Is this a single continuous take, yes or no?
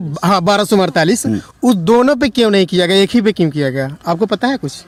yes